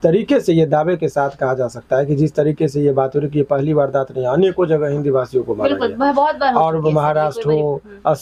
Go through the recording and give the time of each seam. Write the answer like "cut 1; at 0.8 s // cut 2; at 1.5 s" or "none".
none